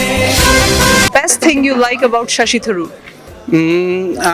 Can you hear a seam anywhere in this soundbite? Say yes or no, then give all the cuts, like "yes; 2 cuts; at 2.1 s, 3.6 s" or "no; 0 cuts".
yes; 1 cut; at 1.1 s